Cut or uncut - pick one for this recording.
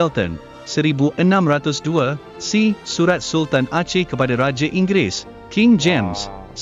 uncut